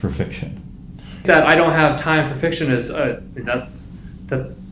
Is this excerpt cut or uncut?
cut